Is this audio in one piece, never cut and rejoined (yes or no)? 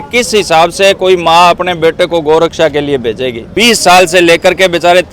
no